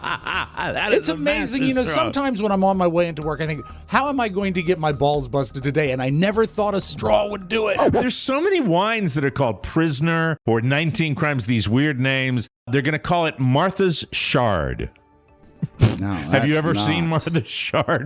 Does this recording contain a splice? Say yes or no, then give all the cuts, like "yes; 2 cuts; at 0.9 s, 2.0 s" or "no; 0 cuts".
yes; 3 cuts; at 7.9 s, 10.4 s, 12.7 s